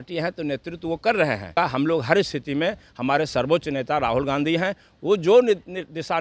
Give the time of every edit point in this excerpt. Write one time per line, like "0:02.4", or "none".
0:01.5